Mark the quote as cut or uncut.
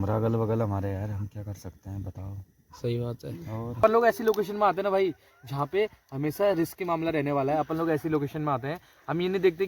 cut